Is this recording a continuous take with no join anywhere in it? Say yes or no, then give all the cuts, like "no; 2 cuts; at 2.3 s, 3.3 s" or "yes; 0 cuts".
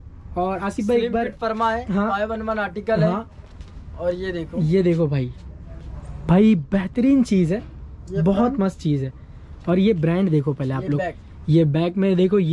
yes; 0 cuts